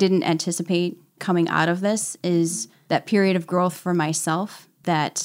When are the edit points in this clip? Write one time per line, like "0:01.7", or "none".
0:01.1
0:02.7